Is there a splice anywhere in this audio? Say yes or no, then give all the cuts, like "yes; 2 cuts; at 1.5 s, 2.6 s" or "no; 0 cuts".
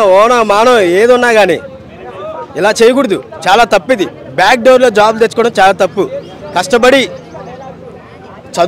no; 0 cuts